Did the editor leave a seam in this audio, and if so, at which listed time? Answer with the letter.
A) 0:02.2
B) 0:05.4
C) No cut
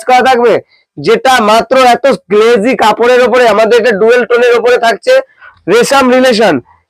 B